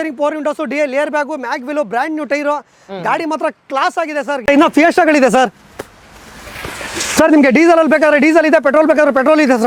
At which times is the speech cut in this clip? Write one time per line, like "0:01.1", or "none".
0:04.5